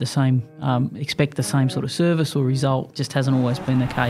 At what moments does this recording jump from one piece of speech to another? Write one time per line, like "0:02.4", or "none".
0:02.9